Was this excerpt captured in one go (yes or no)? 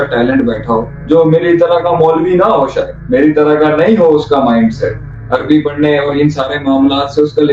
no